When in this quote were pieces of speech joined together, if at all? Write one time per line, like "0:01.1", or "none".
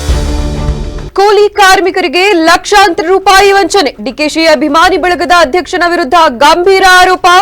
0:01.1